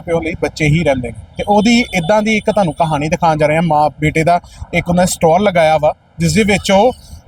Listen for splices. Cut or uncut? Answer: uncut